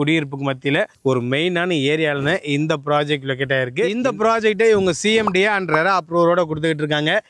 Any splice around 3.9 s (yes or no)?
yes